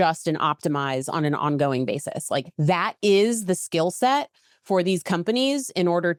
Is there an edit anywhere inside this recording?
no; 0 cuts

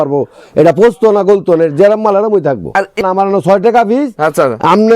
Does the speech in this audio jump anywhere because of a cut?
yes; 1 cut; at 3.0 s

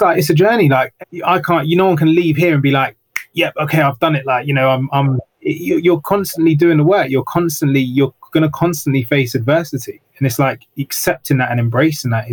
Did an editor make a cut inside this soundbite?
yes; 1 cut; at 0.9 s

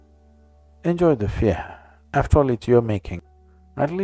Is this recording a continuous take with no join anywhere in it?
no; 1 cut; at 3.1 s

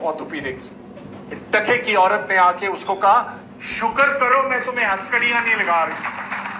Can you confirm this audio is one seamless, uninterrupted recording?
yes; 0 cuts

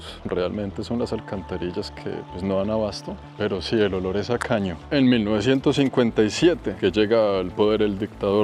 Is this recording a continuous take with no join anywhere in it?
yes; 0 cuts

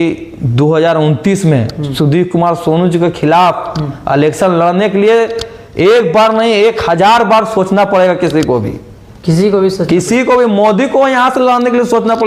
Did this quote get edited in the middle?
no; 0 cuts

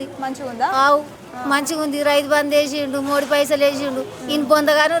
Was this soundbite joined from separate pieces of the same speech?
no; 0 cuts

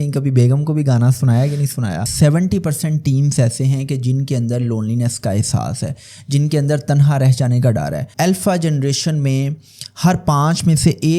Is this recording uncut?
no; 2 cuts; at 2.1 s, 8.1 s

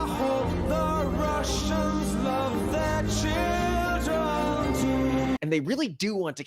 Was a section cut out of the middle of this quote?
no; 0 cuts

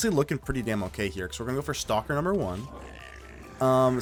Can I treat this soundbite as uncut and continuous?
yes; 0 cuts

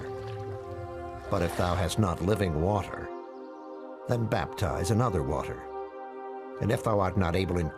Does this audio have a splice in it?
yes; 1 cut; at 6.0 s

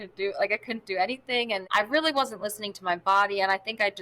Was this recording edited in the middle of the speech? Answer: yes; 1 cut; at 1.6 s

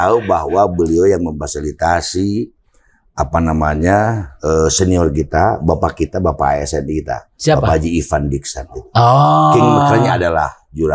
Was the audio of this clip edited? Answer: no; 0 cuts

